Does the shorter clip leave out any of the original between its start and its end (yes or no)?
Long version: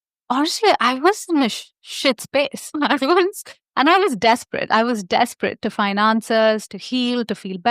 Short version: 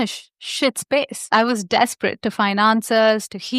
yes